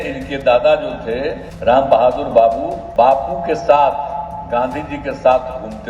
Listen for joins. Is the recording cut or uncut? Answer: cut